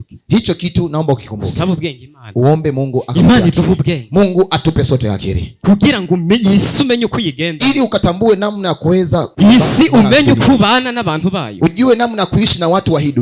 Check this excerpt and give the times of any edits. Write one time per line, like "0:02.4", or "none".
0:09.3